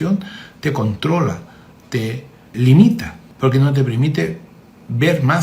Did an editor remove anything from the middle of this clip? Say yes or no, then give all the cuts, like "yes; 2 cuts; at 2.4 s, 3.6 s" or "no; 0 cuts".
yes; 2 cuts; at 2.5 s, 3.2 s